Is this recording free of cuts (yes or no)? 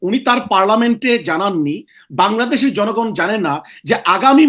yes